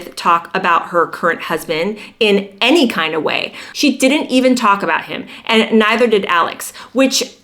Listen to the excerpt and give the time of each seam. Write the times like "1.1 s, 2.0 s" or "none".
3.6 s